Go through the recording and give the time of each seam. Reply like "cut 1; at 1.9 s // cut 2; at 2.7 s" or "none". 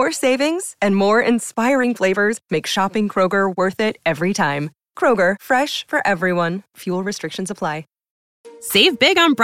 cut 1; at 8.4 s